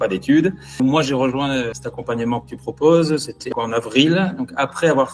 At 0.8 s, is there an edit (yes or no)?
yes